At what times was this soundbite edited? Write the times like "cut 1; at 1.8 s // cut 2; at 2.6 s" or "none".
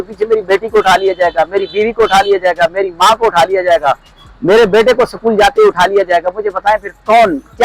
none